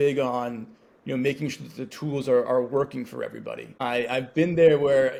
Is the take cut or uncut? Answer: uncut